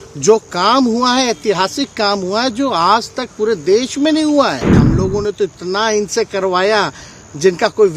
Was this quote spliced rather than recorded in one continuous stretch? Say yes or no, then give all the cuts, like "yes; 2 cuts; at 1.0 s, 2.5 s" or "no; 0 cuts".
yes; 1 cut; at 4.8 s